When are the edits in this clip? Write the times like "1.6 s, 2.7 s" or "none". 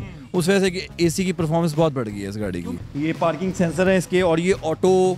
2.8 s